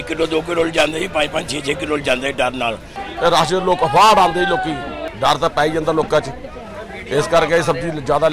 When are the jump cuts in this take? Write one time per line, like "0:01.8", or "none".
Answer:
0:03.0
0:05.0